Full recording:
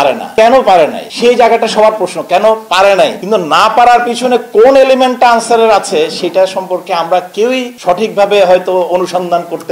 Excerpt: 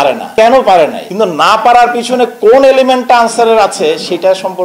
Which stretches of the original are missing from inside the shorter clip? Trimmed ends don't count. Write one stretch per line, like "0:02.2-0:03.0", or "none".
0:01.1-0:03.2